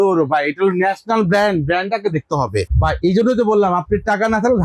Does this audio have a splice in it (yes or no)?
yes